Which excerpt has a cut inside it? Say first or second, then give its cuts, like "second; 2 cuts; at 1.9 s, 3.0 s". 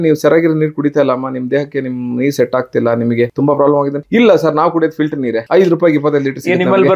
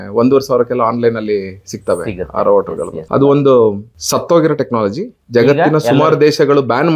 first; 2 cuts; at 3.8 s, 5.4 s